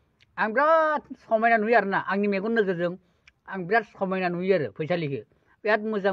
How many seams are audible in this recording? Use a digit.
0